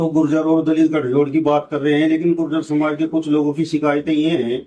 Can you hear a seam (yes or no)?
no